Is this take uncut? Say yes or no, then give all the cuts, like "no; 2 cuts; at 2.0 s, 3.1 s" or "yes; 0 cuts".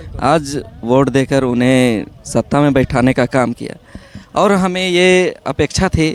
yes; 0 cuts